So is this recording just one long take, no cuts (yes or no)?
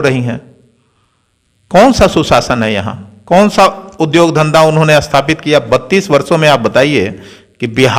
yes